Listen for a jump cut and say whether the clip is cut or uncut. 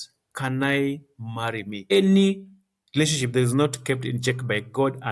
cut